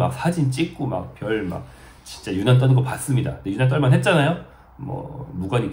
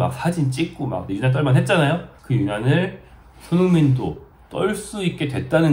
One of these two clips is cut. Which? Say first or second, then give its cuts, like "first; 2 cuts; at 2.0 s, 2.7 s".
second; 2 cuts; at 1.0 s, 2.1 s